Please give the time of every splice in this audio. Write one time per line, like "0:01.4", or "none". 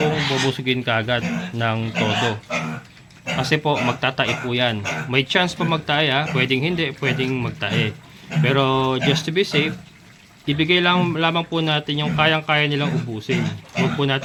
none